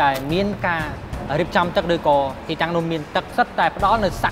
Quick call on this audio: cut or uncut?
cut